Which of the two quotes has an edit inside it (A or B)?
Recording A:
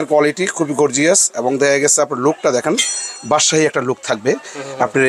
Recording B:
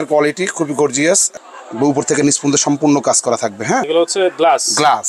B